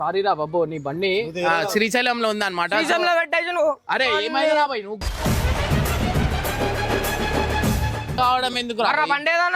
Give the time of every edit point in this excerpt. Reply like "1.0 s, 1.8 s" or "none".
8.2 s